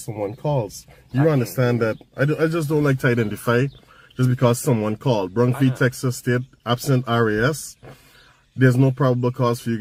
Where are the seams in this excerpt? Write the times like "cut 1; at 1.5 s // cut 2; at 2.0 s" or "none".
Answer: none